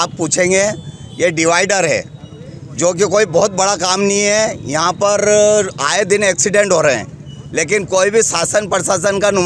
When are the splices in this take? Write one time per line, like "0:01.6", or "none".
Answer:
none